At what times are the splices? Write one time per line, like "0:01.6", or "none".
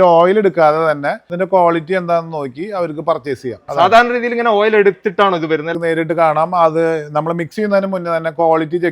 0:01.2
0:03.6
0:05.7